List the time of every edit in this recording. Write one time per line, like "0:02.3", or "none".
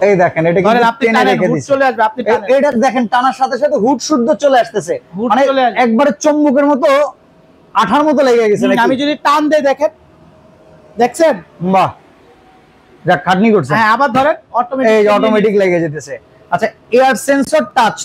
none